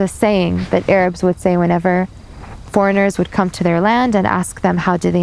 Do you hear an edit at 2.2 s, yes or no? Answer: no